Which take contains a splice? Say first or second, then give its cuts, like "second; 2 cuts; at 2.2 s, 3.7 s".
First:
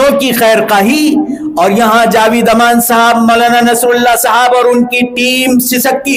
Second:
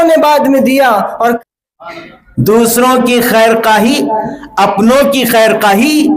second; 1 cut; at 1.4 s